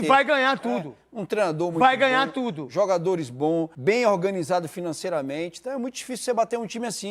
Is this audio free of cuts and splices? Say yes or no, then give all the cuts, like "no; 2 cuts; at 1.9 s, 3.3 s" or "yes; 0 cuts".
no; 1 cut; at 3.7 s